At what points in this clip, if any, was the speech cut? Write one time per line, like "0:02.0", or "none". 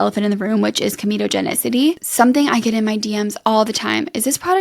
0:02.0